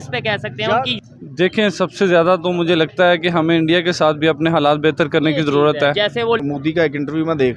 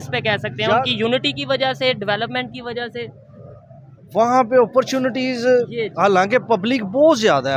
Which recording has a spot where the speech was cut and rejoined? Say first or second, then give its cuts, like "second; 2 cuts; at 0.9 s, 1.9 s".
first; 2 cuts; at 0.9 s, 6.4 s